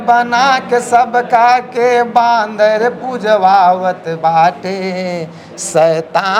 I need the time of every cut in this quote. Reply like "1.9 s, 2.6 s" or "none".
none